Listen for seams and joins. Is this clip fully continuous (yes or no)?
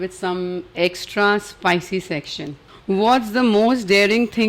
no